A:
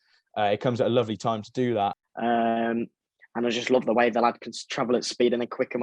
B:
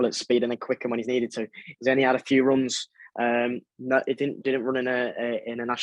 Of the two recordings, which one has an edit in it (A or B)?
A